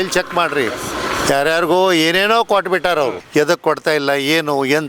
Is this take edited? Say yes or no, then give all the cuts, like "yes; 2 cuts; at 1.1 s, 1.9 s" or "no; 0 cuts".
yes; 1 cut; at 3.2 s